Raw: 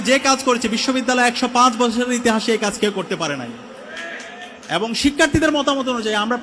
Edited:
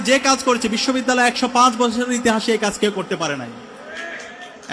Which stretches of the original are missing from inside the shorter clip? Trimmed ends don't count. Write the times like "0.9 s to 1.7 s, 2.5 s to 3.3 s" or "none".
none